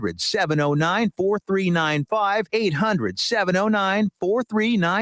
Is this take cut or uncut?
cut